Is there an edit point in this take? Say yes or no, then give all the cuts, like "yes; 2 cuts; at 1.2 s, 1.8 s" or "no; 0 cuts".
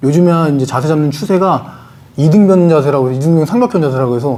no; 0 cuts